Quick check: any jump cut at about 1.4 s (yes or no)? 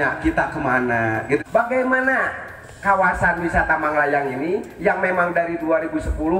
yes